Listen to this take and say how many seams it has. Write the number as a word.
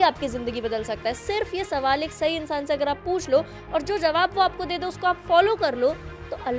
zero